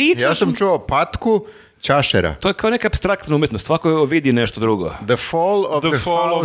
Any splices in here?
no; 0 cuts

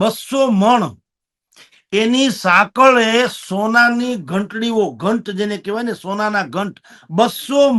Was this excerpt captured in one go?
yes; 0 cuts

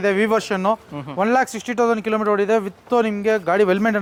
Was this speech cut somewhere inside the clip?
no; 0 cuts

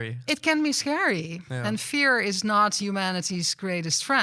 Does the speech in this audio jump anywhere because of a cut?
no; 0 cuts

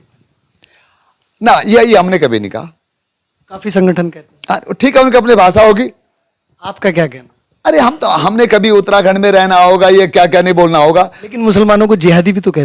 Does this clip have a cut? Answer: no; 0 cuts

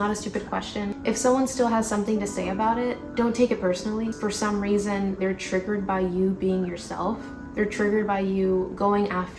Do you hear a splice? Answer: no; 0 cuts

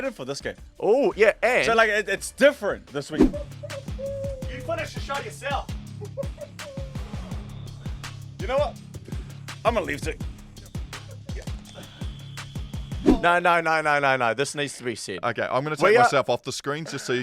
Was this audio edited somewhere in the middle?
yes; 2 cuts; at 3.1 s, 13.1 s

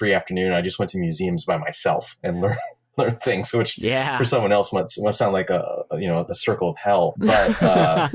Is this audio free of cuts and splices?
no; 1 cut; at 7.1 s

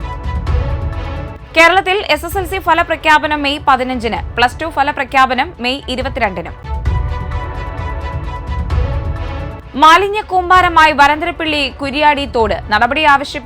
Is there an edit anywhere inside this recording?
yes; 1 cut; at 1.1 s

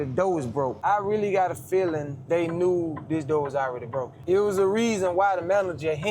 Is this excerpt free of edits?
no; 3 cuts; at 0.8 s, 2.1 s, 4.1 s

